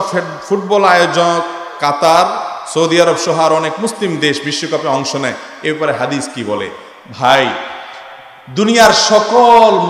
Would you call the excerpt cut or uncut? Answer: uncut